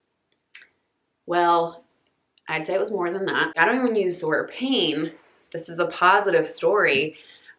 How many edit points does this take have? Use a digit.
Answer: 1